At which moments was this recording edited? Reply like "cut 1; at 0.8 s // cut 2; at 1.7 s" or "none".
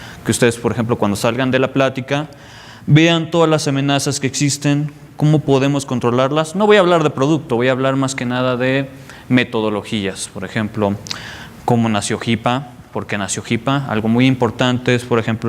cut 1; at 1.9 s